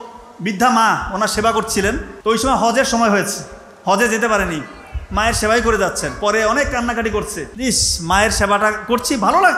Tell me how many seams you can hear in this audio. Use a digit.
2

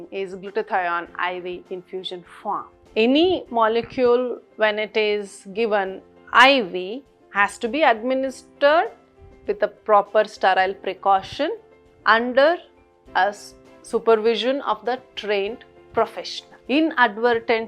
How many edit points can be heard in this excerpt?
1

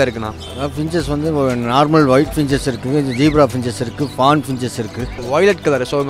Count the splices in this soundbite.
1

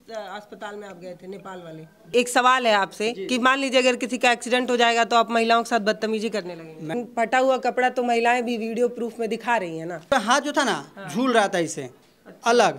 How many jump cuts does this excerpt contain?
3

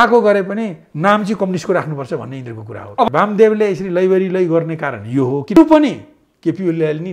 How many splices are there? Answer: 2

